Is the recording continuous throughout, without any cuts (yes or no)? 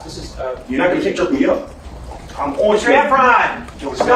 yes